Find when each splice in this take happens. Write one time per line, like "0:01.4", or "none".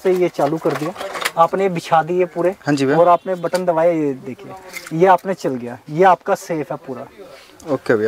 none